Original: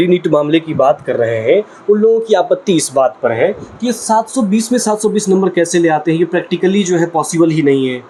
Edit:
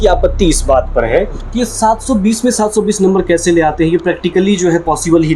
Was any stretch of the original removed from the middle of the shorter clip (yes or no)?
no